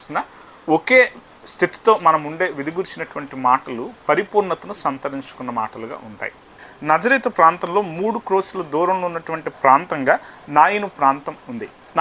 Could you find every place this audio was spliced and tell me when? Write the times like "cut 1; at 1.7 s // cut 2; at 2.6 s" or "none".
cut 1; at 6.6 s